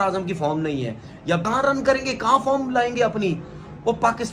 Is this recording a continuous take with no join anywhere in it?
no; 1 cut; at 1.4 s

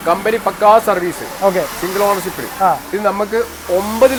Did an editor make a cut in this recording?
no; 0 cuts

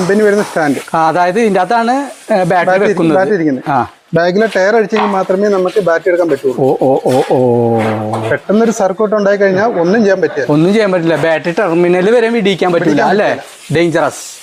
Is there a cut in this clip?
no; 0 cuts

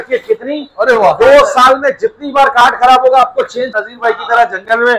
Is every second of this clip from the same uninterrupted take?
no; 1 cut; at 3.8 s

